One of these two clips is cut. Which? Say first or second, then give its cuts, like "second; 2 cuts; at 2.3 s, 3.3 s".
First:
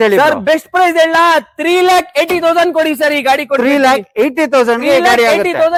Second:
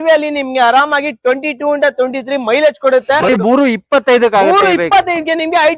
second; 1 cut; at 3.3 s